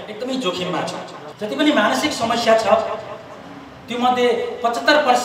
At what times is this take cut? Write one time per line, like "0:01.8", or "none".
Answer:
0:01.2